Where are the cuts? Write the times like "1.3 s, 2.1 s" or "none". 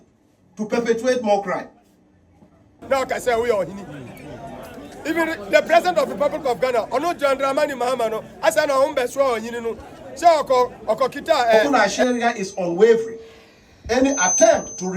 2.8 s, 11.7 s

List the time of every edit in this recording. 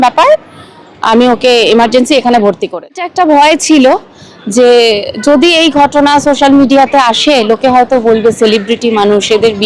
3.0 s

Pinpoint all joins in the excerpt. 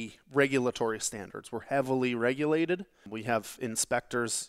3.0 s

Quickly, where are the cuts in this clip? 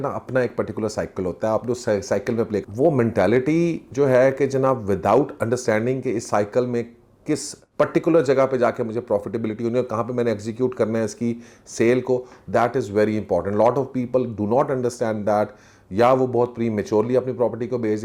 2.6 s

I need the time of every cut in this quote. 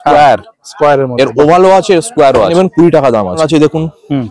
2.5 s, 3.4 s

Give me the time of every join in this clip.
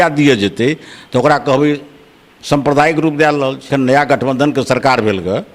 3.7 s

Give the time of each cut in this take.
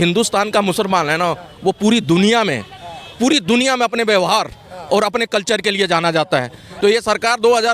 6.7 s

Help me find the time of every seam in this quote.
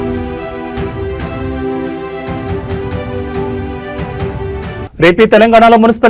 3.7 s, 4.8 s

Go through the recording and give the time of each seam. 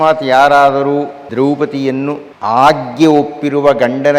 1.2 s, 2.3 s

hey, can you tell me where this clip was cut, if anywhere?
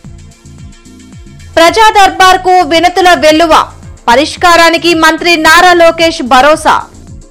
1.3 s

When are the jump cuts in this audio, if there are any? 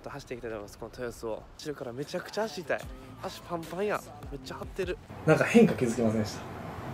1.6 s, 5.1 s

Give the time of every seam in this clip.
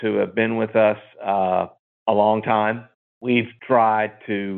3.2 s

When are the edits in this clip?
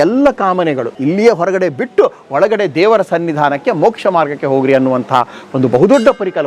0.9 s

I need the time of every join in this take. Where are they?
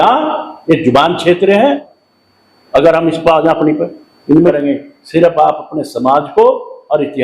1.9 s, 4.5 s

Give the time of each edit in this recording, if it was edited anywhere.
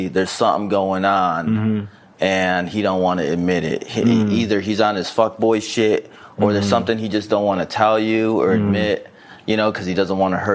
none

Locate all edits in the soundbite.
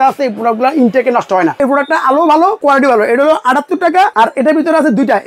1.6 s, 2.6 s, 4.1 s

